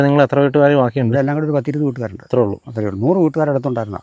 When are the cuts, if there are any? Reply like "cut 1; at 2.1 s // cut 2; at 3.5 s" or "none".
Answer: none